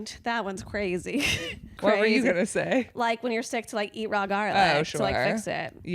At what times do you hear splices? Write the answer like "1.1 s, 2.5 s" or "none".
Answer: 1.8 s